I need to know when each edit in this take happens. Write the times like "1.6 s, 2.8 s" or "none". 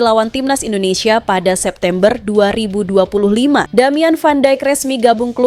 3.7 s

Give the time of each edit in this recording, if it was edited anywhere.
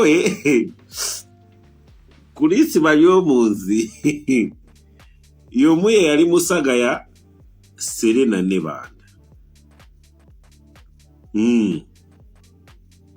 9.0 s, 10.9 s, 11.9 s

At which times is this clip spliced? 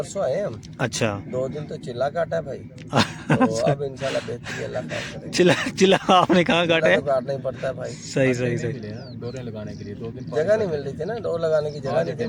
none

